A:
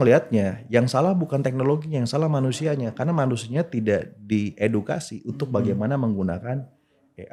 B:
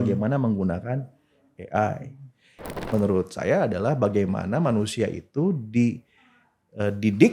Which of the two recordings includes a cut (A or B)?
B